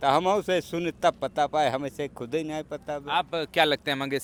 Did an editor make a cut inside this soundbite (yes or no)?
no